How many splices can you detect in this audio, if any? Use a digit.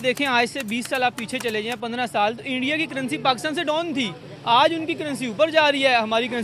0